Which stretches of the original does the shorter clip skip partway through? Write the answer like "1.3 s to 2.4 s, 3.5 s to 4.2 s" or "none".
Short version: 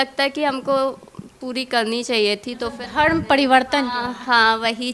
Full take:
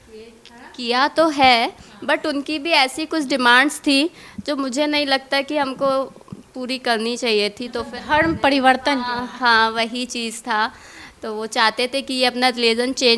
none